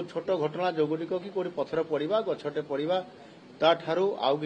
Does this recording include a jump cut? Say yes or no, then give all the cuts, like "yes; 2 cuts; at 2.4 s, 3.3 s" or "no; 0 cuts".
no; 0 cuts